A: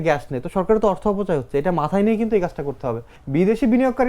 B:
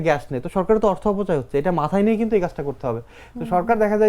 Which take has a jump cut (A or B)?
A